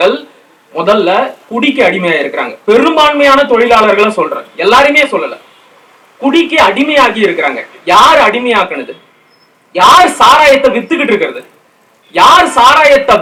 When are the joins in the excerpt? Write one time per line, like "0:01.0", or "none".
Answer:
none